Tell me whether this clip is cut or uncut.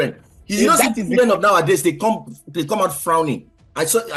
uncut